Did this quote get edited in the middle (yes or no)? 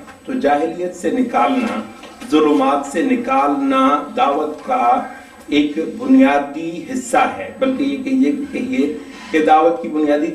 no